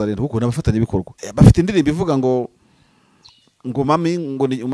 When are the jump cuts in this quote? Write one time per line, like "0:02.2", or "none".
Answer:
0:01.2